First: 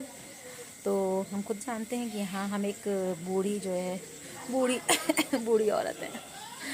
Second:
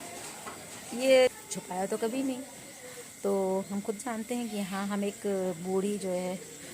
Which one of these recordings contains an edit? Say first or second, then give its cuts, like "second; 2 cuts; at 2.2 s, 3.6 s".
second; 1 cut; at 1.3 s